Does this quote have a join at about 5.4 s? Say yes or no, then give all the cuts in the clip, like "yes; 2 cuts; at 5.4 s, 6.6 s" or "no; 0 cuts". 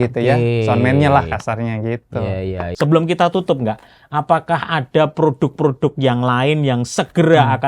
no; 1 cut; at 2.7 s